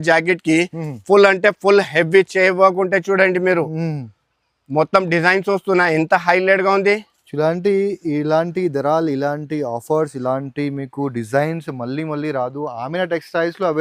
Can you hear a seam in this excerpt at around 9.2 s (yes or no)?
no